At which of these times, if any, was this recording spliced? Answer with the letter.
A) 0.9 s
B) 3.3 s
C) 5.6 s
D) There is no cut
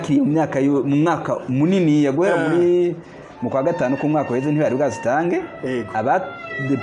D